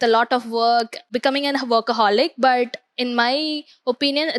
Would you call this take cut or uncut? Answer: cut